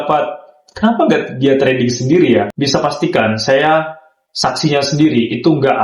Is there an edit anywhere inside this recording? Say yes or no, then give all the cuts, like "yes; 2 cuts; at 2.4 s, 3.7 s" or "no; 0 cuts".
yes; 1 cut; at 2.5 s